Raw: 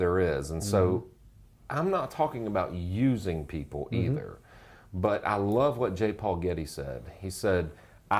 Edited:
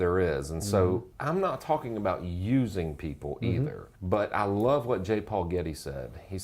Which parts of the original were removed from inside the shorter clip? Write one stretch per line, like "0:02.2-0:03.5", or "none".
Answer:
0:01.1-0:01.6
0:04.4-0:04.8